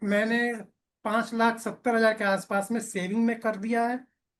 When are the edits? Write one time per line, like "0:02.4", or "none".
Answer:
none